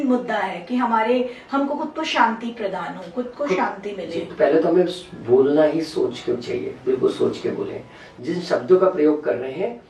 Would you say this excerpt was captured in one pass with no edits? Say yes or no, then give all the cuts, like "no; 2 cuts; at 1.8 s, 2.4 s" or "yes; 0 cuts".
no; 1 cut; at 4.3 s